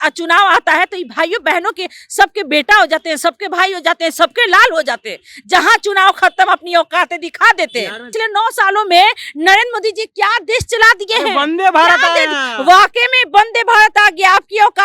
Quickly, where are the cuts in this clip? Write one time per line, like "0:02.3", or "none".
0:08.1